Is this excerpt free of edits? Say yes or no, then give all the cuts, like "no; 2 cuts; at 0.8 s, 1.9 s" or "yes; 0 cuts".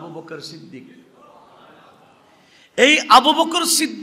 yes; 0 cuts